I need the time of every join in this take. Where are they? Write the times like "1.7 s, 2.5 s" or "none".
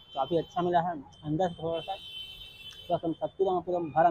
none